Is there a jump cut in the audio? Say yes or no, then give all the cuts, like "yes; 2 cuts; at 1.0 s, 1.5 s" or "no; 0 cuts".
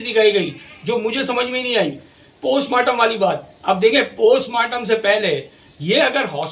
no; 0 cuts